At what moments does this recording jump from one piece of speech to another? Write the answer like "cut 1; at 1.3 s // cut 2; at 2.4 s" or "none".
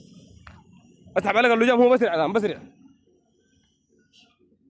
cut 1; at 3.2 s